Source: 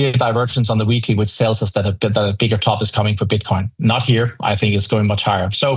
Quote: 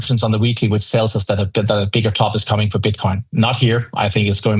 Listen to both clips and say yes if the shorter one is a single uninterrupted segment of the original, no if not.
yes